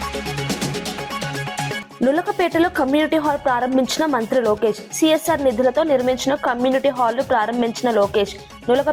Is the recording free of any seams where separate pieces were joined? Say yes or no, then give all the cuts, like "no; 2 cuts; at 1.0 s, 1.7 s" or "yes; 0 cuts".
no; 1 cut; at 1.9 s